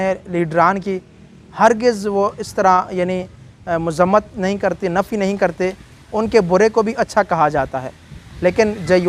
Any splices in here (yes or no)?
no